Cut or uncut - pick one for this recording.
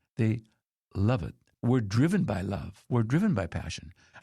cut